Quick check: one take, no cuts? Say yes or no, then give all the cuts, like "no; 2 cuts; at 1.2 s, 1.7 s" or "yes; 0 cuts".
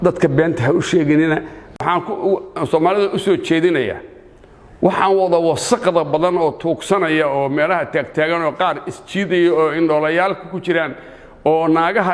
no; 1 cut; at 1.6 s